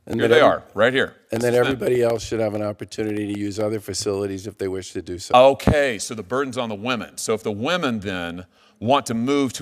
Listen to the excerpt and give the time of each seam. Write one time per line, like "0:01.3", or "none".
none